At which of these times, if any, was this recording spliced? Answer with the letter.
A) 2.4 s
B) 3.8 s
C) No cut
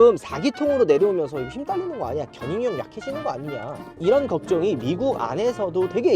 B